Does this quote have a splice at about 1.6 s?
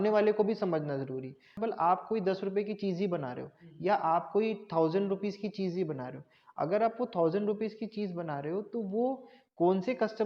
yes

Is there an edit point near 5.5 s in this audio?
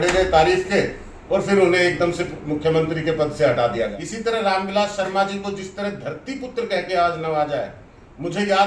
no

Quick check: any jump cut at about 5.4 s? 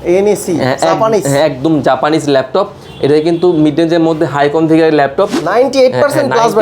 yes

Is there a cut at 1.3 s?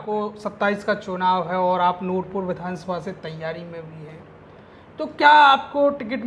no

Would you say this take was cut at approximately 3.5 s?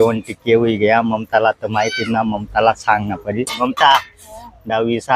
yes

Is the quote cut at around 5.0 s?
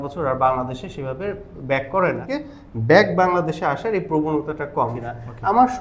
yes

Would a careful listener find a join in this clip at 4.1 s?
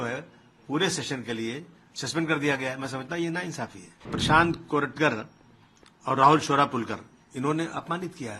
yes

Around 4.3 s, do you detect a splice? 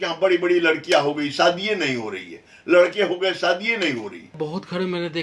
yes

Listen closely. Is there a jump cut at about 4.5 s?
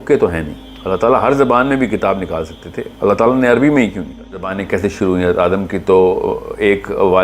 yes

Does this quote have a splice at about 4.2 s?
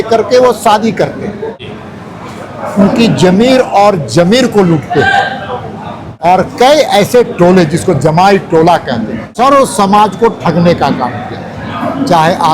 no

